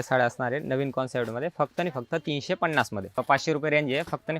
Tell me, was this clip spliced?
yes; 1 cut; at 3.2 s

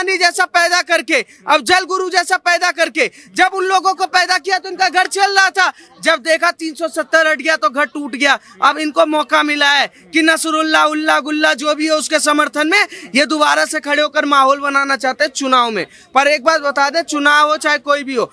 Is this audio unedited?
yes; 0 cuts

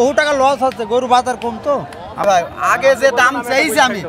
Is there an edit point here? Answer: yes; 1 cut; at 2.2 s

